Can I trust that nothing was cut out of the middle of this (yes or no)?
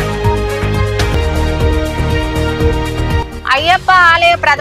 no